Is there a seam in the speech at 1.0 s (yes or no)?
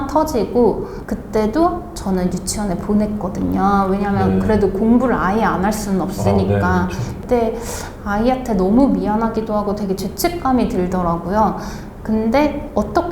yes